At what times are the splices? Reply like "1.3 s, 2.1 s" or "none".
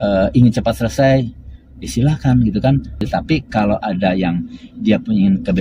3.0 s